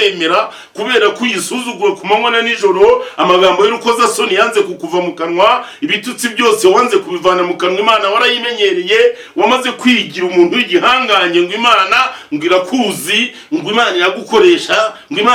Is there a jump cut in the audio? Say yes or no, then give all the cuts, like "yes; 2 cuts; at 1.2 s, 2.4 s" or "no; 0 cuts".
no; 0 cuts